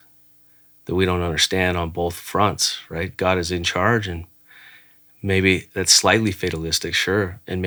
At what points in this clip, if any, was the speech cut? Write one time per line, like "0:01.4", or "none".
none